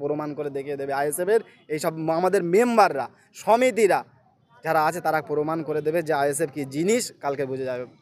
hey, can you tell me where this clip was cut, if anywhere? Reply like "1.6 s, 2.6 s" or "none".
none

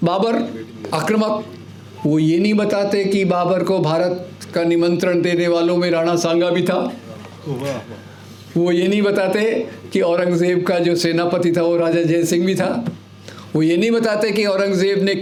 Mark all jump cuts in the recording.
none

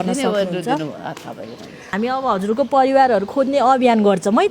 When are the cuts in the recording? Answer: 1.9 s

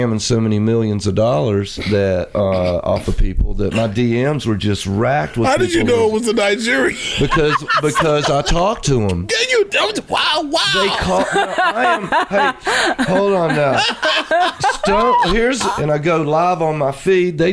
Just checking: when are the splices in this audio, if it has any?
15.7 s

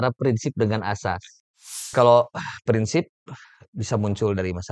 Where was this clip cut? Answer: 1.4 s

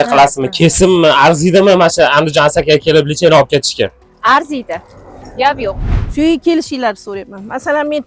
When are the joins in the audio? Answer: 5.9 s

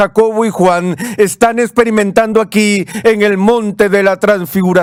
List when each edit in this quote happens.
none

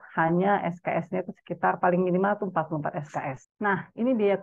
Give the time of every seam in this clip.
3.4 s

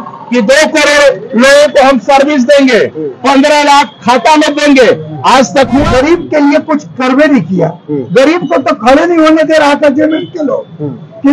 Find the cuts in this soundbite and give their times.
5.9 s

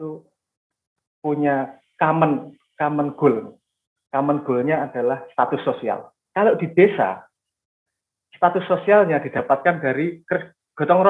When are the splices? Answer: 6.1 s

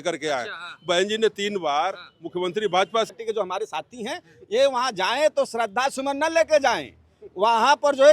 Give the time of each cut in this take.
3.1 s

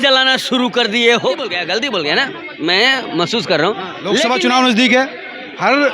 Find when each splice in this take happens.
1.6 s, 4.2 s

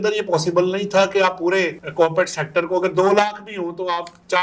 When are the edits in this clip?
none

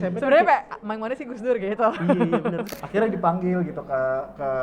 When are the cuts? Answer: 2.7 s

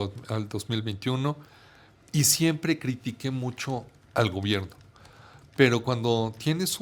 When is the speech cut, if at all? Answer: none

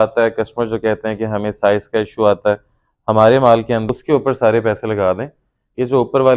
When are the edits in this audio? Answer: 3.8 s

